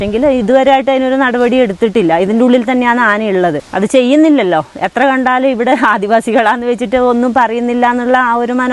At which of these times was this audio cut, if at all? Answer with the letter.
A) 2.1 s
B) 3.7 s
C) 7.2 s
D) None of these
B